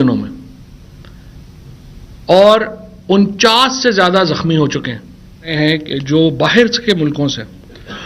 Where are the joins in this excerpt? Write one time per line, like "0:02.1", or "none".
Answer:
0:05.5